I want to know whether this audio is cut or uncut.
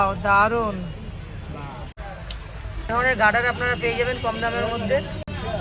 cut